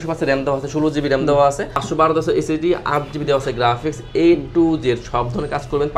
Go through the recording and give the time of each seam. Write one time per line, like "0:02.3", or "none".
0:01.8

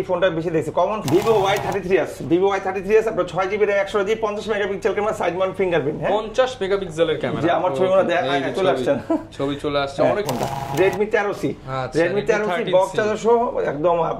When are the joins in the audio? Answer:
0:01.0
0:10.3

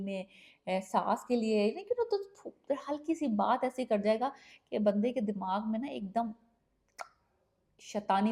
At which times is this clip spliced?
none

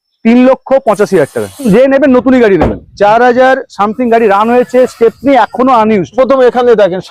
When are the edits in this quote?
0:01.7
0:06.1

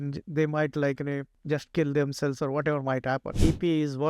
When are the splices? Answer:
0:01.3
0:03.3

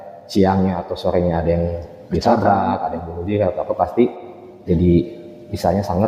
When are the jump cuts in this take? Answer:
none

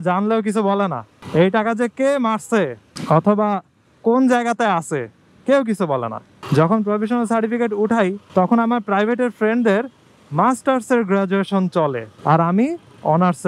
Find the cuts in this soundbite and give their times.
0:06.3
0:08.2
0:12.1

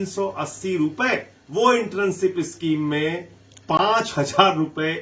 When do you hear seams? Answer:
0:01.4

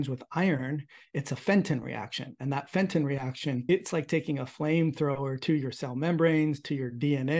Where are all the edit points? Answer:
0:03.6

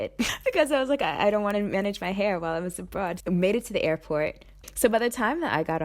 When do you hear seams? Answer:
0:03.2
0:04.7

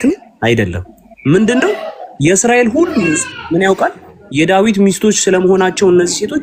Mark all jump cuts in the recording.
none

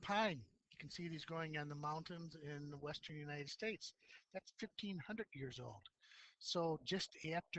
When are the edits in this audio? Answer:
0:06.1

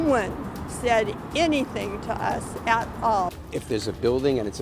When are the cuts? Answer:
0:03.3

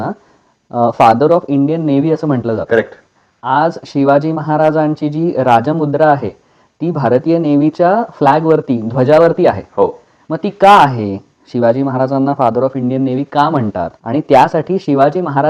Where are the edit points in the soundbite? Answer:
none

